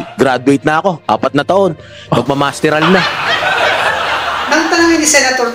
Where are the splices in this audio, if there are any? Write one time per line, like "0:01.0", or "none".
0:03.0
0:04.3